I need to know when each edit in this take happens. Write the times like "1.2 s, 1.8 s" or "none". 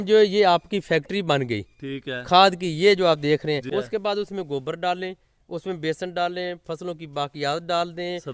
3.6 s